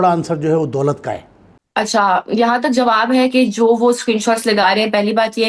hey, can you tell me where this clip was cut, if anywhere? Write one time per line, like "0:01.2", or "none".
none